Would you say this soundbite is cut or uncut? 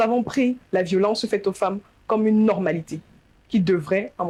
uncut